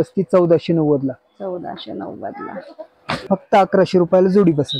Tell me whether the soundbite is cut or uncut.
cut